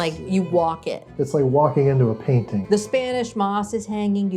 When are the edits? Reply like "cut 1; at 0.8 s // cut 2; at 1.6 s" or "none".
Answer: cut 1; at 2.5 s